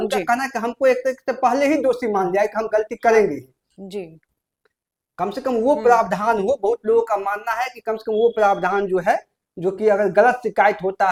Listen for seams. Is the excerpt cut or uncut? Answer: uncut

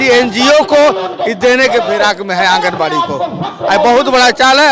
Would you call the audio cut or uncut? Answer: uncut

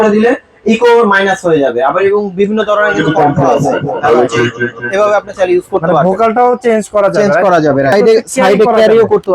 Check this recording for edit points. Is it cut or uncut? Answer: cut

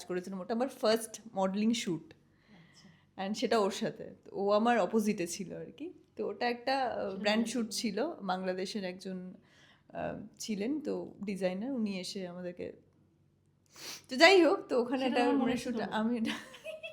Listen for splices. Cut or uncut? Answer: uncut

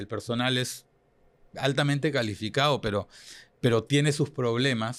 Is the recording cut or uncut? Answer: uncut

